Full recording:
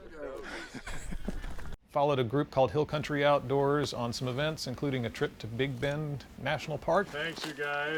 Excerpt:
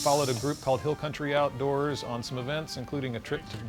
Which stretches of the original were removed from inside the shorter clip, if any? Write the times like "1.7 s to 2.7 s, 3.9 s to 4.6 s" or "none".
none